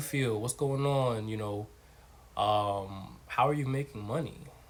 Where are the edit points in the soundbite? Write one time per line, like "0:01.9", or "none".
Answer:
none